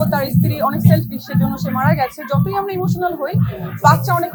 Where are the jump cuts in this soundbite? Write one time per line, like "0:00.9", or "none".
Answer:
none